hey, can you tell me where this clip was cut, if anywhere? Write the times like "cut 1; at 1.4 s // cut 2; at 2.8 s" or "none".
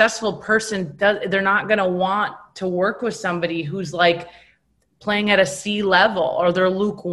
none